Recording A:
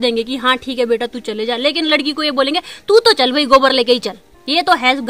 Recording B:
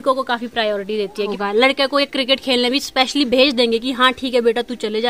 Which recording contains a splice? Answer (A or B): B